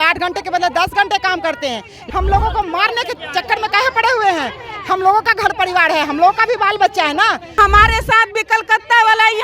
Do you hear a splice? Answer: yes; 2 cuts; at 2.0 s, 7.6 s

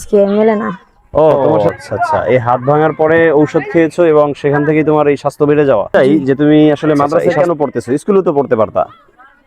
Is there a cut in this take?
yes; 2 cuts; at 1.4 s, 5.9 s

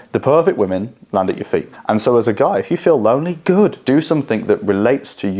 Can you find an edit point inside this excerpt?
yes; 2 cuts; at 1.7 s, 3.8 s

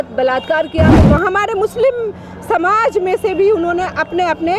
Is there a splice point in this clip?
yes; 1 cut; at 1.0 s

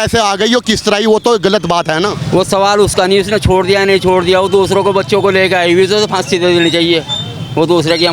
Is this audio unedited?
no; 1 cut; at 2.2 s

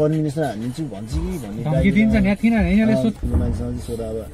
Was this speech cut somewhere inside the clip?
yes; 1 cut; at 3.2 s

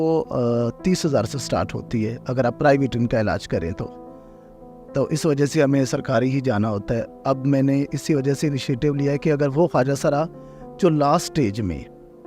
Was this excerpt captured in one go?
yes; 0 cuts

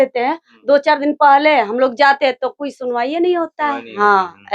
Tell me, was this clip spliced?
no; 0 cuts

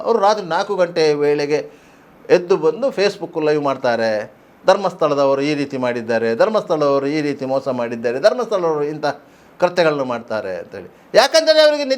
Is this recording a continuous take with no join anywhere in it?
yes; 0 cuts

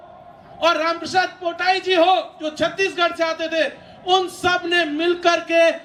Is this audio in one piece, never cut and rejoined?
yes; 0 cuts

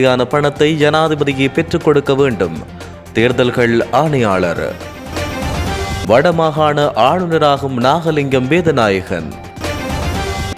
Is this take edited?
no; 0 cuts

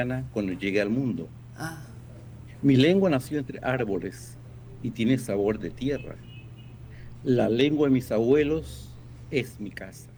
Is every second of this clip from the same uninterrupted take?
yes; 0 cuts

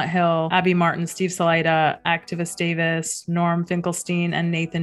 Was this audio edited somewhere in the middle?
no; 0 cuts

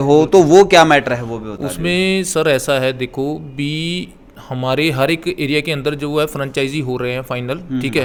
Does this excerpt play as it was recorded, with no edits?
yes; 0 cuts

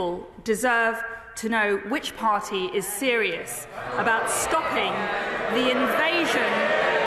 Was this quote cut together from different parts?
no; 0 cuts

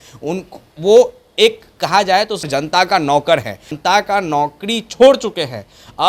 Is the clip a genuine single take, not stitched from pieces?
no; 2 cuts; at 2.5 s, 3.8 s

